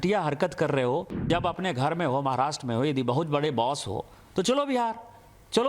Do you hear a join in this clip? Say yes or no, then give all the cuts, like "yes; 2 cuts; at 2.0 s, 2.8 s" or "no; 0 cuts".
yes; 1 cut; at 1.3 s